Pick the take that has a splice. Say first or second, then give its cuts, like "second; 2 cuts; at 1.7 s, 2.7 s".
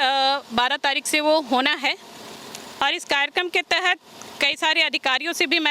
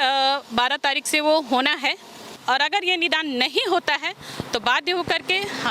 second; 1 cut; at 2.3 s